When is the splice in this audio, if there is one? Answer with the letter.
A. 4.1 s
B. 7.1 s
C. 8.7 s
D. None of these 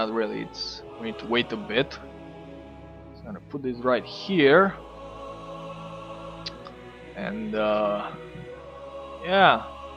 A